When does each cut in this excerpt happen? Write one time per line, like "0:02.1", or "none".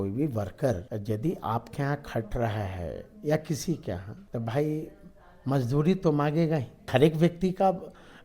0:00.9
0:04.1
0:06.9